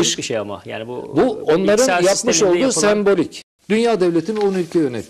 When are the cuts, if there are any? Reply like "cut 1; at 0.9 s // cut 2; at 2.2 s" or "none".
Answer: cut 1; at 3.4 s